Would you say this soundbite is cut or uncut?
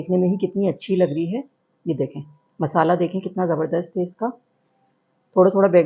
uncut